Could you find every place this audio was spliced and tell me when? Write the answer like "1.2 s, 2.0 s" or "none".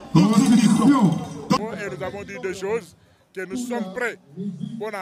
1.6 s